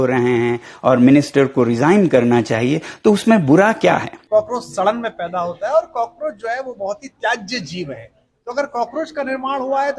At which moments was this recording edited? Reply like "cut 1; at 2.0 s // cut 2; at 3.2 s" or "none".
cut 1; at 4.1 s